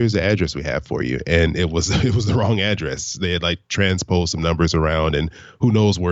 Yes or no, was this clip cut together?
no